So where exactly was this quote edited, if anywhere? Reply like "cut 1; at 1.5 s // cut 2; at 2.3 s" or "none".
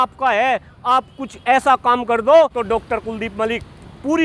cut 1; at 2.8 s